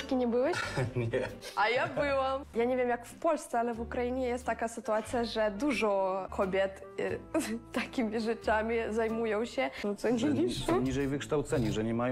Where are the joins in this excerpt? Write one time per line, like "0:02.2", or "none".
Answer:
0:02.5
0:06.3
0:09.8

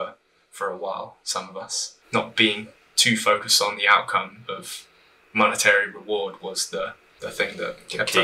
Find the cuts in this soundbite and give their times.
0:01.8
0:07.0

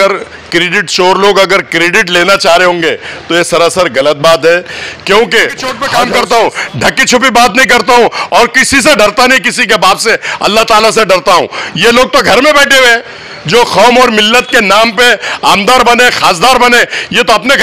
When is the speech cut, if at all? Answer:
0:05.8

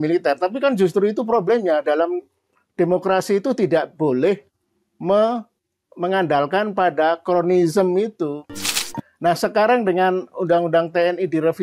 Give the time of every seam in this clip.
0:08.7

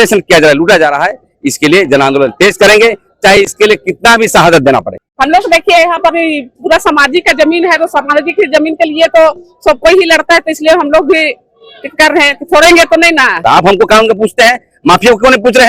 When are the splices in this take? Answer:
0:05.1
0:13.4

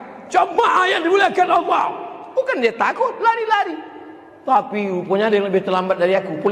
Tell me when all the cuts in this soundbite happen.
none

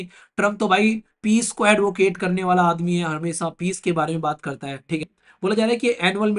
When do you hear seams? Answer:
0:05.2

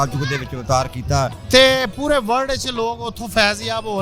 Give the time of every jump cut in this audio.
0:01.4

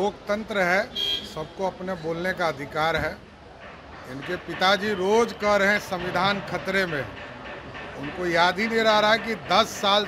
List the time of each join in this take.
none

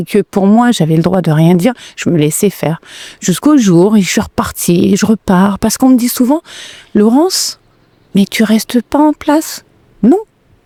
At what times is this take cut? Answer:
none

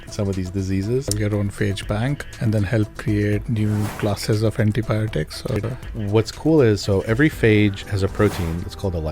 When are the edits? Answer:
0:01.1
0:02.3
0:03.5
0:05.7

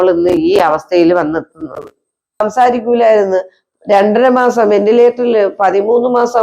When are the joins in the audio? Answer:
0:02.4

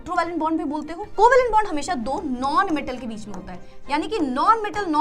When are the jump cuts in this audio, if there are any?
0:01.0

